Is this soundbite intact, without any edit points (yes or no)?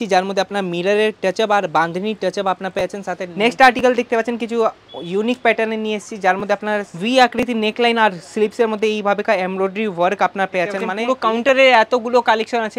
no